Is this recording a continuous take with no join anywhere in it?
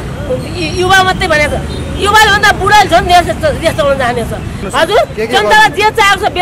no; 1 cut; at 4.6 s

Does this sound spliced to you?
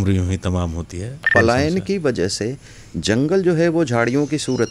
yes; 1 cut; at 1.3 s

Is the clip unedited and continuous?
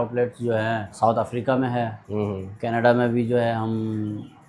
no; 1 cut; at 1.0 s

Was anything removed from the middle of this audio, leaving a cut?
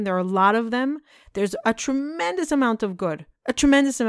no; 0 cuts

